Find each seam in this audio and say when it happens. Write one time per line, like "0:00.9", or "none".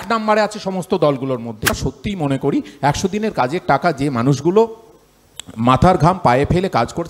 0:01.7